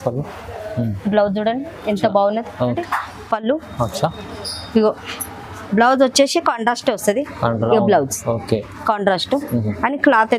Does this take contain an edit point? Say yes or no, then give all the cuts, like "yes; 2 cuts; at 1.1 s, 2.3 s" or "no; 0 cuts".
yes; 1 cut; at 2.8 s